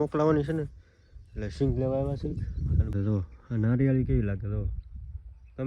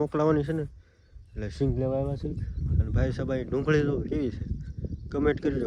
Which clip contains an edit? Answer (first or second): first